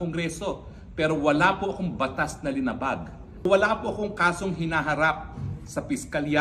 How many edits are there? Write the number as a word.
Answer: one